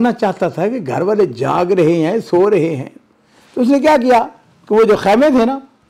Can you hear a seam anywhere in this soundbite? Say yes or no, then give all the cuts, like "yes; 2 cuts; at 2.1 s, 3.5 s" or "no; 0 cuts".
no; 0 cuts